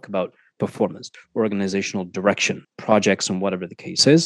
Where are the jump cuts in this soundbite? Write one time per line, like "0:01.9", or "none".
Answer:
0:01.1
0:02.7

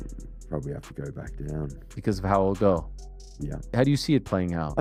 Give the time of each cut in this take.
none

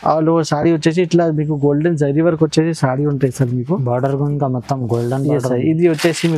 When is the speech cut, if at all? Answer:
none

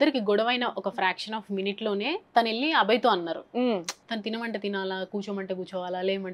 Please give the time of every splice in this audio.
0:04.0

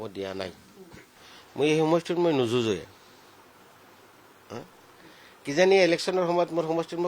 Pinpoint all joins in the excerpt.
0:01.1

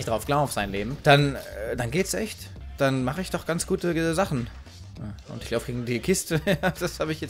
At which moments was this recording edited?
none

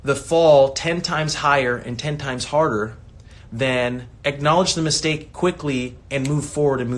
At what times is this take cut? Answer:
0:04.1
0:06.0

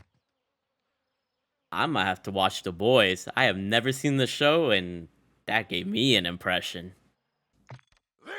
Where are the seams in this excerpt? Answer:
0:07.5

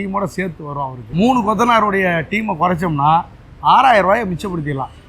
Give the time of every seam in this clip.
0:00.9

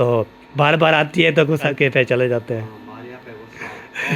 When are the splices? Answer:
0:01.7

